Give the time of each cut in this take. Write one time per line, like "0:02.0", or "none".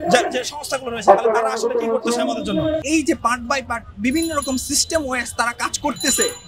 0:02.8